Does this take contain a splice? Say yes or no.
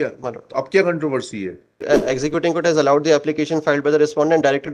yes